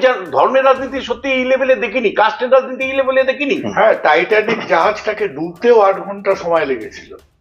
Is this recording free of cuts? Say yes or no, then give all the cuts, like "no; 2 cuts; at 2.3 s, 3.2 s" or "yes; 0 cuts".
no; 1 cut; at 3.7 s